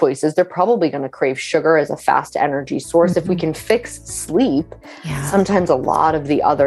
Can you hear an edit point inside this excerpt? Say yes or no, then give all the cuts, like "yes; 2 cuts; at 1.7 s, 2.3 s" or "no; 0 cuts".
no; 0 cuts